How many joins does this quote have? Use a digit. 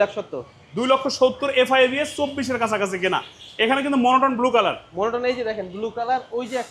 0